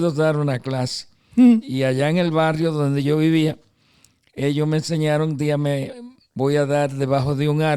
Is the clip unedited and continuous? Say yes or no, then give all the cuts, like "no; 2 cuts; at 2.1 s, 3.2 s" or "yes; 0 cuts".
yes; 0 cuts